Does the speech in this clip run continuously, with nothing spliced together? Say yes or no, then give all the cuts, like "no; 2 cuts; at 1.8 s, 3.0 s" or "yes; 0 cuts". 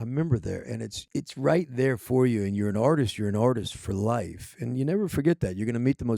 no; 1 cut; at 1.0 s